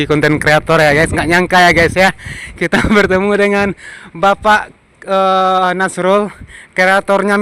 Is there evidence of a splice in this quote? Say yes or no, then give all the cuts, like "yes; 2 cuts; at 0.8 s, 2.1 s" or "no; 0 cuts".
no; 0 cuts